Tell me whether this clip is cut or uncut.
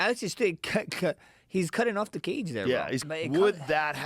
cut